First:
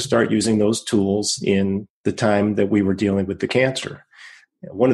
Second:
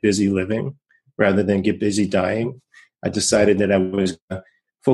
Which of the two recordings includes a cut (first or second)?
first